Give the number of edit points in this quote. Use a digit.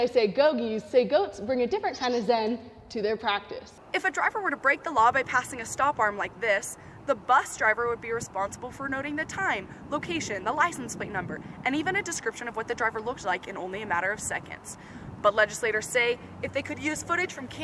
1